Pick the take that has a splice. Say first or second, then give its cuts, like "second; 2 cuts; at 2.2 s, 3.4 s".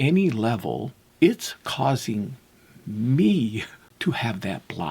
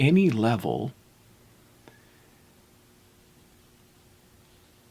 first; 2 cuts; at 1.0 s, 3.8 s